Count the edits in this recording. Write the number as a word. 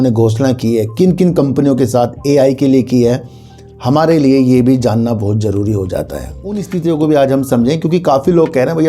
one